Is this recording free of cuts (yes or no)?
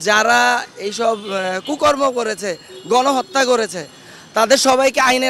yes